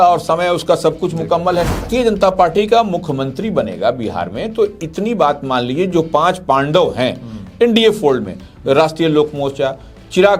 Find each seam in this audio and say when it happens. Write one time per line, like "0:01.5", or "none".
0:01.9